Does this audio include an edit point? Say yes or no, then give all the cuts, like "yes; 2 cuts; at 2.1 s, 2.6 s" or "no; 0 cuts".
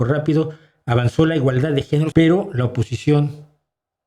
yes; 1 cut; at 2.1 s